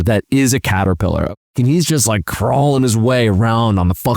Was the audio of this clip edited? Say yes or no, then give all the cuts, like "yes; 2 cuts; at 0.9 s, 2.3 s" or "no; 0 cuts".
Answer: yes; 1 cut; at 1.4 s